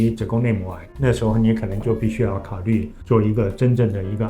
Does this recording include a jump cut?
yes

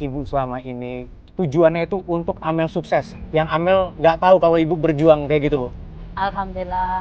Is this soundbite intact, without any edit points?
no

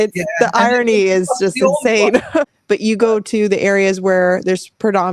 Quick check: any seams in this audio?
yes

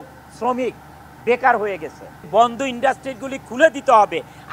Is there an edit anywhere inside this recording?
yes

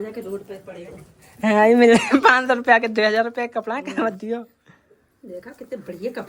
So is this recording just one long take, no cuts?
yes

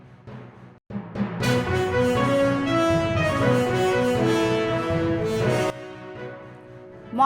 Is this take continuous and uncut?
no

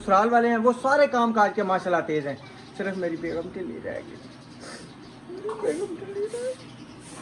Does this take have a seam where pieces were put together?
no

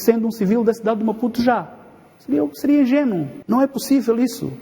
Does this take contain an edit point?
yes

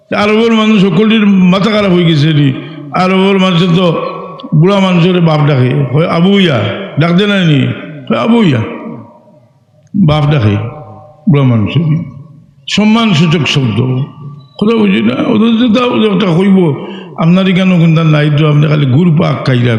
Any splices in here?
no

